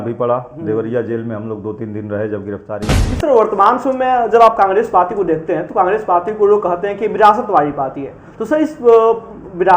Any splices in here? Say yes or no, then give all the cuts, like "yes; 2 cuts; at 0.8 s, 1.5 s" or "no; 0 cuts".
yes; 1 cut; at 3.0 s